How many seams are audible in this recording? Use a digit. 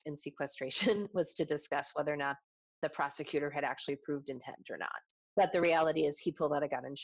0